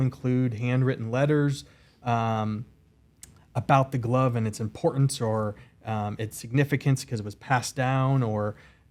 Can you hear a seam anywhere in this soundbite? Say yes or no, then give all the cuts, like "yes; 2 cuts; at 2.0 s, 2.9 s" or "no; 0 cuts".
no; 0 cuts